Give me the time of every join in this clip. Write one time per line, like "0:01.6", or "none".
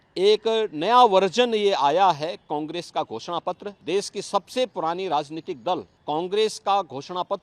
0:03.7
0:05.9